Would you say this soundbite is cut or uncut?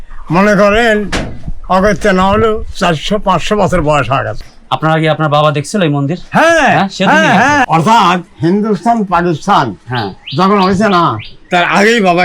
cut